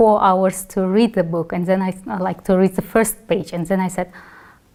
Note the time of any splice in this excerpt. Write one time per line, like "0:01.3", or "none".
none

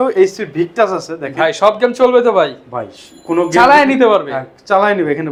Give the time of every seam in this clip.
none

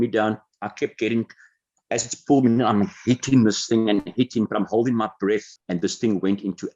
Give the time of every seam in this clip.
0:05.6

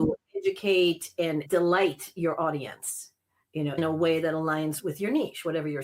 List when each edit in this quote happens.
0:01.4
0:03.8
0:04.8

